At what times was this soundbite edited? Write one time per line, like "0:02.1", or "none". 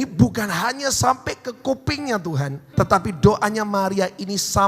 0:02.6